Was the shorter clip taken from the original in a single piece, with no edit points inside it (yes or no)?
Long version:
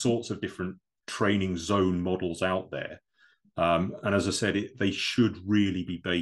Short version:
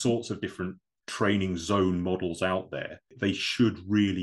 no